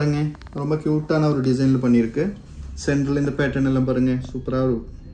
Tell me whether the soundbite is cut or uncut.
uncut